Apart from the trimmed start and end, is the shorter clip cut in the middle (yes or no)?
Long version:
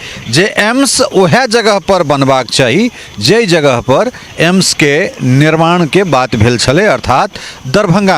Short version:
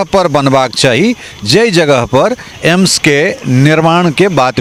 no